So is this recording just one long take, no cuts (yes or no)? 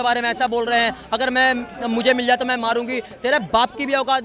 yes